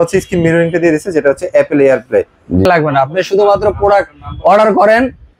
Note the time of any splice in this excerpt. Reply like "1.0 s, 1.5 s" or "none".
2.7 s